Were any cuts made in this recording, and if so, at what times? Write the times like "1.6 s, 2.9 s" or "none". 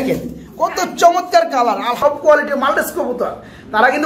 2.0 s